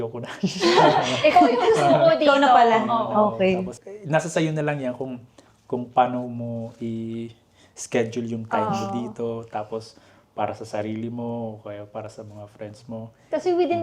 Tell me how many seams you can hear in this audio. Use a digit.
0